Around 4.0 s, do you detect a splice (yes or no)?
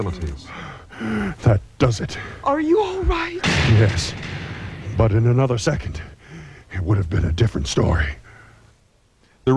yes